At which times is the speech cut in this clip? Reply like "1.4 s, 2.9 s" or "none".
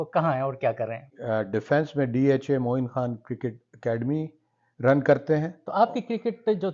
1.1 s, 5.6 s